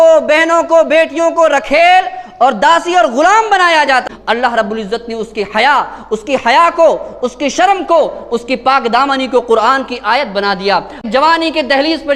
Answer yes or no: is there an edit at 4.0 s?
yes